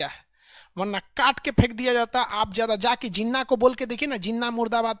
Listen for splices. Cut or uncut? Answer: uncut